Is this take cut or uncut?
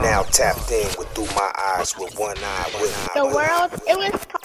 uncut